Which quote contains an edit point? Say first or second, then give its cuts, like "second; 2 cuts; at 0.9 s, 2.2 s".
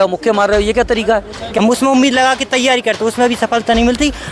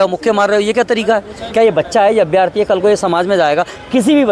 first; 1 cut; at 1.5 s